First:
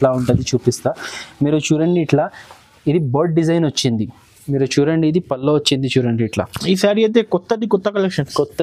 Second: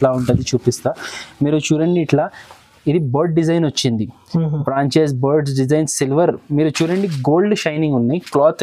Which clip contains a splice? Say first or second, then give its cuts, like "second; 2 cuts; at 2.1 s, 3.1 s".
first; 1 cut; at 4.2 s